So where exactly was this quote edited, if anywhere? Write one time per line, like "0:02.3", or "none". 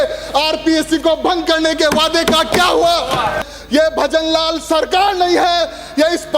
0:03.4

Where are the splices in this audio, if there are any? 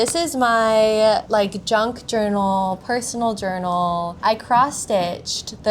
0:01.2
0:04.2

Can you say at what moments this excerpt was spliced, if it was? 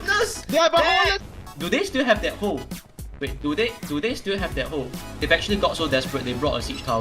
0:01.2
0:05.2

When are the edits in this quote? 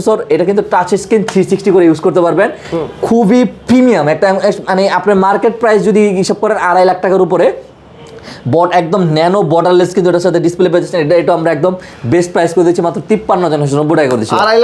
none

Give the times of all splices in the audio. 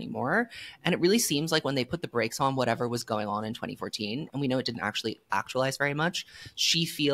none

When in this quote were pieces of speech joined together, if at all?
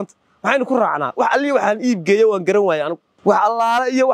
0:03.0

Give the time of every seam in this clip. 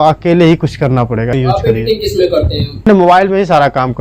0:01.3
0:02.9

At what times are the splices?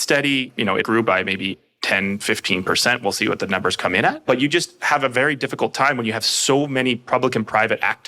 0:00.8
0:01.7

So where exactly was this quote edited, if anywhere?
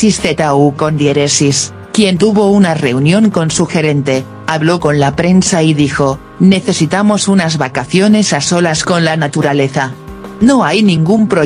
0:01.8

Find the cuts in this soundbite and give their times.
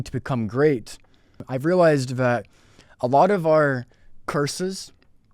0:01.5

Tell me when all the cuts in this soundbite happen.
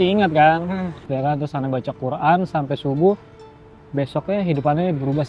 none

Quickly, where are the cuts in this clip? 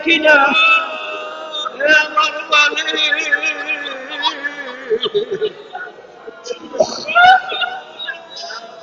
none

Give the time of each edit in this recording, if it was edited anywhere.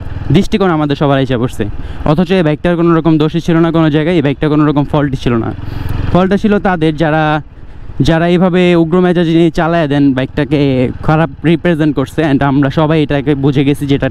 none

